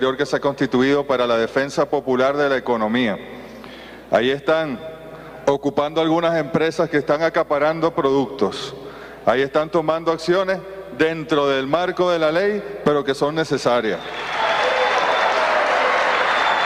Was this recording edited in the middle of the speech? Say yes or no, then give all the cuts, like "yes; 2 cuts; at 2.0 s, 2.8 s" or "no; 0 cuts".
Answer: yes; 1 cut; at 8.7 s